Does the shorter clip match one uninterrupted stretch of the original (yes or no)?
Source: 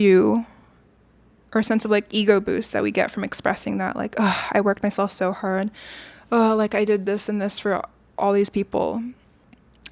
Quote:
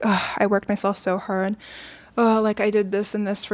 yes